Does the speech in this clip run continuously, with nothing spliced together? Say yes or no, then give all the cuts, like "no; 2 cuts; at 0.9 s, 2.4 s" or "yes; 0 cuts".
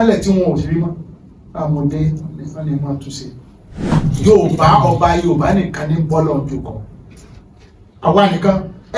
no; 1 cut; at 3.9 s